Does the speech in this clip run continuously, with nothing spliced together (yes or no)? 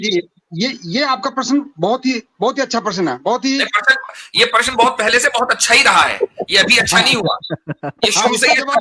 yes